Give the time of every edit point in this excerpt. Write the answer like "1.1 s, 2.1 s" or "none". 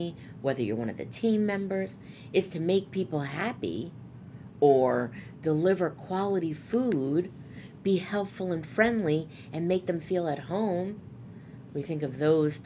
none